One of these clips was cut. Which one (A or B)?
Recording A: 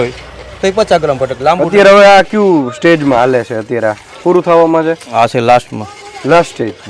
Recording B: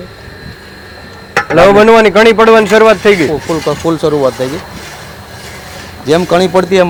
A